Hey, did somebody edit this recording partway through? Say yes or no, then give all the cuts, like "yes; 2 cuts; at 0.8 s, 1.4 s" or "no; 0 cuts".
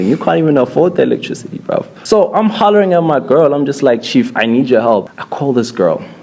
yes; 2 cuts; at 1.9 s, 5.1 s